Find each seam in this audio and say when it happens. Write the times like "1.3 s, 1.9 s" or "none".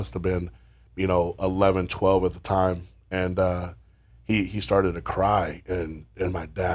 none